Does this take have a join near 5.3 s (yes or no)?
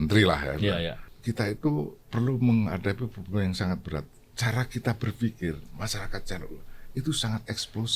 no